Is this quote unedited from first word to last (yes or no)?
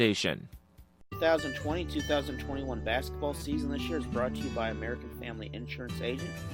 no